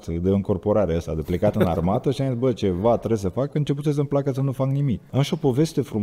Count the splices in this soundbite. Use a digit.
1